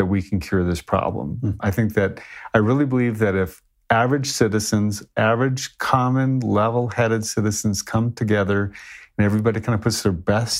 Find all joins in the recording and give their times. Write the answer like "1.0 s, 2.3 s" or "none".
none

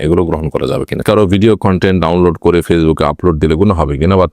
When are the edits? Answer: 1.0 s

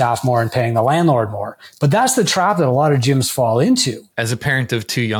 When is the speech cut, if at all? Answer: 4.0 s

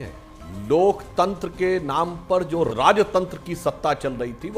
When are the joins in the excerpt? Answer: 2.7 s

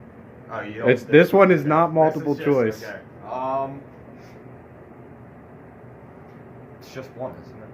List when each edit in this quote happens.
none

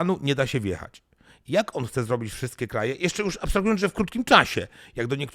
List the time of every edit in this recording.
none

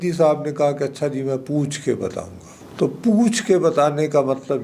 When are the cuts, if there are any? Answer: none

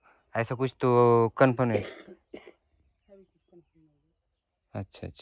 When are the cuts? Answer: none

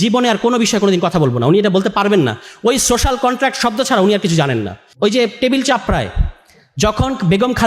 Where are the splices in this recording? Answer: 4.8 s

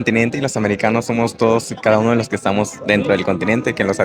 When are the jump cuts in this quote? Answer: none

